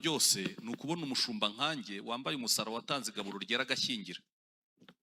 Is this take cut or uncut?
uncut